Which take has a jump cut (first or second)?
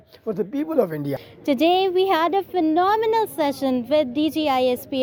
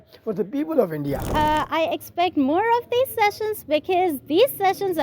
second